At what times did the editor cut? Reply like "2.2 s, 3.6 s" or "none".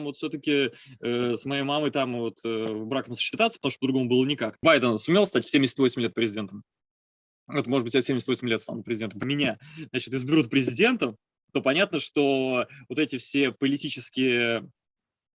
4.6 s, 9.2 s